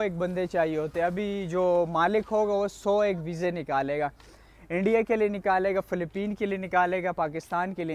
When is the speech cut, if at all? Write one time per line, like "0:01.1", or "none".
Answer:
none